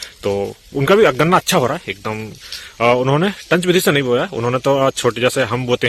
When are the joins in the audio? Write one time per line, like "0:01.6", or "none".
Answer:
none